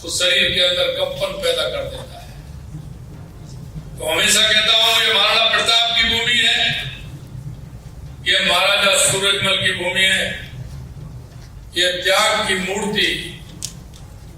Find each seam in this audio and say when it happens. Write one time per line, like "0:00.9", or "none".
none

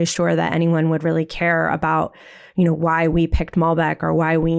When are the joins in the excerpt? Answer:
none

